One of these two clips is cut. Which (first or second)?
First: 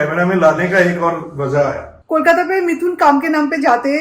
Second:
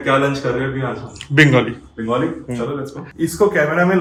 first